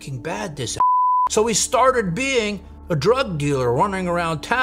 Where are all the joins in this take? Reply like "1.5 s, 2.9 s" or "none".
none